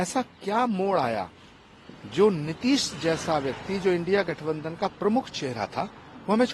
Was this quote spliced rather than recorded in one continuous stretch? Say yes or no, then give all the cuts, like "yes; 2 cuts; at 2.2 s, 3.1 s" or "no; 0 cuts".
no; 0 cuts